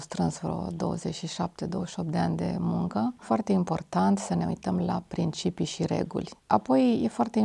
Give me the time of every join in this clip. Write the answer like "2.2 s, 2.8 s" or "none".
3.2 s, 6.3 s